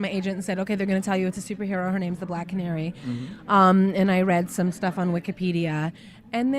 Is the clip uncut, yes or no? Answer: no